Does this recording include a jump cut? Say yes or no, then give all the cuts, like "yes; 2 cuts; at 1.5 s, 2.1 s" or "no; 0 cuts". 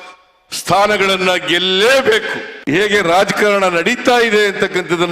yes; 1 cut; at 2.5 s